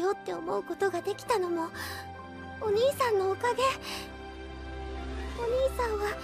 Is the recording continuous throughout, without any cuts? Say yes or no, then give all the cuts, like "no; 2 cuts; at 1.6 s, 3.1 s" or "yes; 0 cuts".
no; 1 cut; at 3.1 s